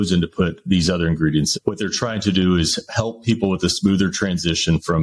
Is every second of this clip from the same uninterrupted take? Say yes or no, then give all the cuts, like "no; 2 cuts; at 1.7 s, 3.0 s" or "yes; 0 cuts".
no; 1 cut; at 1.5 s